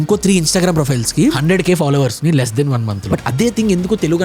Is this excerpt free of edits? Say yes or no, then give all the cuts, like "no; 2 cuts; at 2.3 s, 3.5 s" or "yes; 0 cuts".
no; 2 cuts; at 1.4 s, 3.0 s